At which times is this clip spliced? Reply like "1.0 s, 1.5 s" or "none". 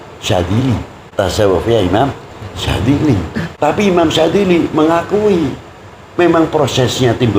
1.0 s, 3.5 s